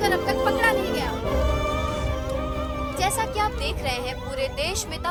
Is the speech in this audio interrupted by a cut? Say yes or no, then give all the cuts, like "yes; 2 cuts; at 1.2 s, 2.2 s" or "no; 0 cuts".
no; 0 cuts